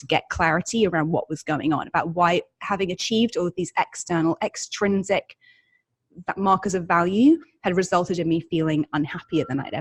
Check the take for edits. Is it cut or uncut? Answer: uncut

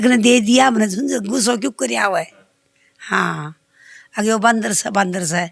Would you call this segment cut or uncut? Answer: uncut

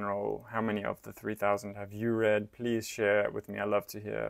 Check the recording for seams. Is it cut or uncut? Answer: uncut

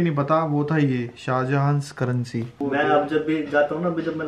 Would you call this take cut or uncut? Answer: cut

